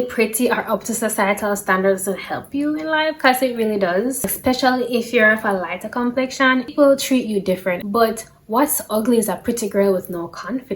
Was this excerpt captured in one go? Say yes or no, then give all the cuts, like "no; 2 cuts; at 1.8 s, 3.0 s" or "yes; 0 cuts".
no; 3 cuts; at 4.3 s, 6.7 s, 7.8 s